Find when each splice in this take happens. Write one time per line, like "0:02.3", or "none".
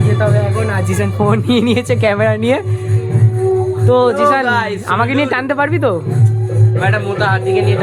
none